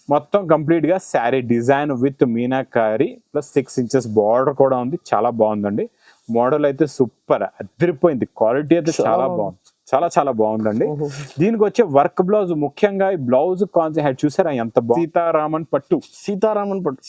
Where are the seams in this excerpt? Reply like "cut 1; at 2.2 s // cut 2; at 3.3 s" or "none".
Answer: cut 1; at 15.0 s